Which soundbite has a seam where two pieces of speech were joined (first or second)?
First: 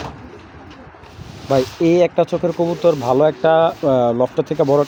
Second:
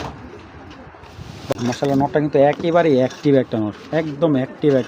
second